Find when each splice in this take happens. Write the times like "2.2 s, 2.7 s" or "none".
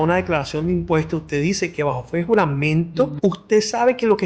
3.1 s